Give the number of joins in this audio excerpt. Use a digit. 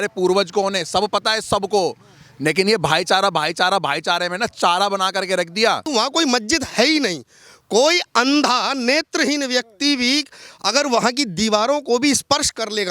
1